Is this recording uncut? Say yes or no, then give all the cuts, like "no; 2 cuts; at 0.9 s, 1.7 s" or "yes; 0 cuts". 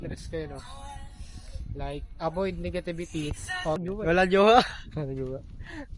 no; 1 cut; at 3.8 s